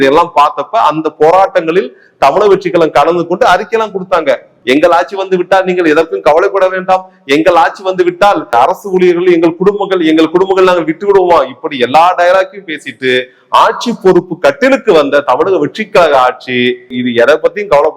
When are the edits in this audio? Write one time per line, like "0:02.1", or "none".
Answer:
0:04.5
0:08.5
0:17.0